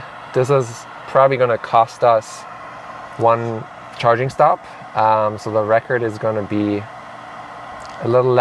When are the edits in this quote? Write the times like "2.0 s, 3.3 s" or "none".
none